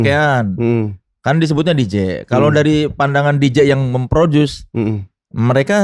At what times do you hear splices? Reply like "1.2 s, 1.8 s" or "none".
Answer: none